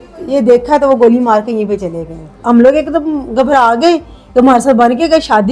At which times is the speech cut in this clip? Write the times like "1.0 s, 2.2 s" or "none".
2.3 s